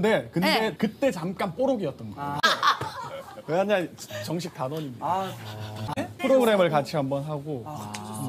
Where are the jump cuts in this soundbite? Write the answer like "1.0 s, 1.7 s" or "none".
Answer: none